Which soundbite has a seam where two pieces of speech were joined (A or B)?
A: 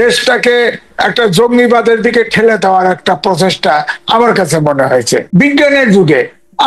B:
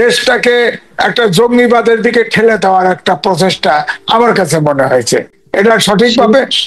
A